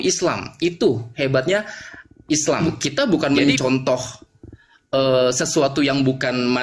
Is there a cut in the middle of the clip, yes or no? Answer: yes